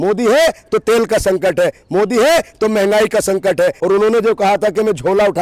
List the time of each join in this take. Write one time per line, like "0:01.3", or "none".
0:03.8